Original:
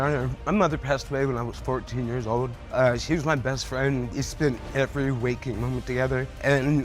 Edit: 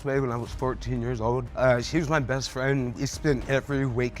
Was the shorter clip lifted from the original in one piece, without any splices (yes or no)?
no